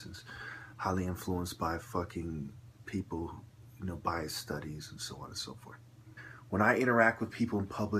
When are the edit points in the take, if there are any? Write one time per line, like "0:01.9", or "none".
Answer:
none